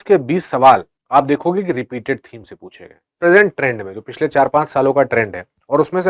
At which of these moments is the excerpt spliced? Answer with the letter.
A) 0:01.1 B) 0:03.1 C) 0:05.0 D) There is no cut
B